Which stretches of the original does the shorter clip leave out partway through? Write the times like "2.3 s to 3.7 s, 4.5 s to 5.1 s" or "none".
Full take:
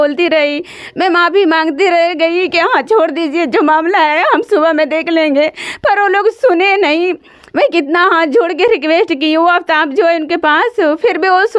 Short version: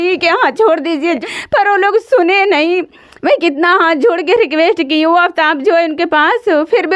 3.5 s to 5.5 s

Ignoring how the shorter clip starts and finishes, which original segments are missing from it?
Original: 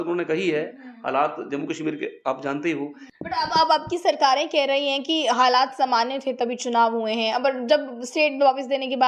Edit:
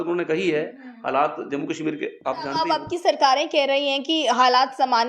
2.5 s to 3.5 s

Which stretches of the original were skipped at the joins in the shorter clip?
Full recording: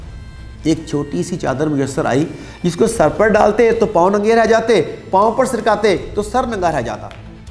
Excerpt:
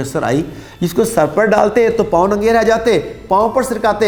none

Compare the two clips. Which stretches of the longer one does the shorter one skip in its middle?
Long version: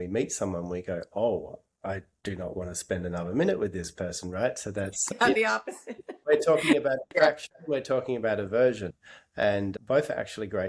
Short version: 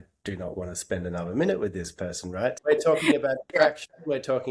4.6 s to 6.2 s

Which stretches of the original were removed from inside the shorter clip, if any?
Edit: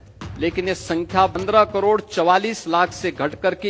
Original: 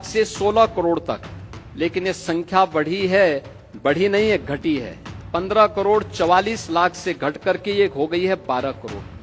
2.7 s to 5.3 s

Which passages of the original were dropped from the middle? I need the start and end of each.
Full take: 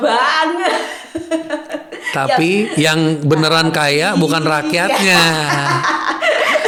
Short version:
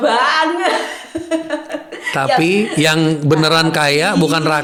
none

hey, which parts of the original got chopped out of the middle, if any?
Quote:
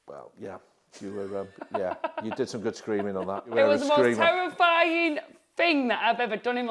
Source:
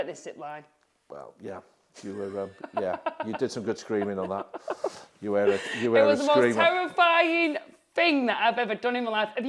4.5 s to 5.9 s

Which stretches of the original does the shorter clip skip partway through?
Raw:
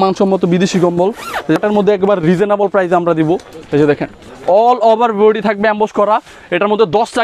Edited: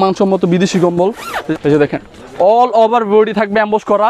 1.5 s to 3.5 s

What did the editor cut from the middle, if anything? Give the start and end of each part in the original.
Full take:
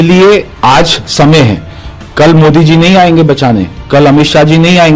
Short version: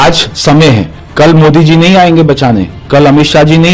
1.7 s to 2.0 s

